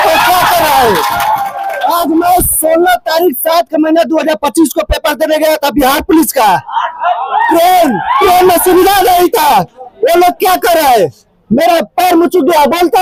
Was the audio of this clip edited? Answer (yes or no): no